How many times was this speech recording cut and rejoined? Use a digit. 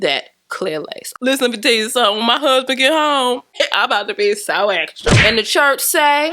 2